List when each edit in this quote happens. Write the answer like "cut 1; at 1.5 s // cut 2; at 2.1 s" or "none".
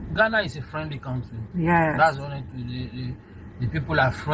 none